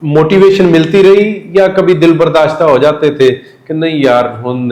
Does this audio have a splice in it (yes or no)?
no